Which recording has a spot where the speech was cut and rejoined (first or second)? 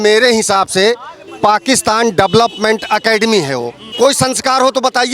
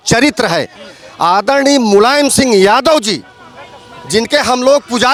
first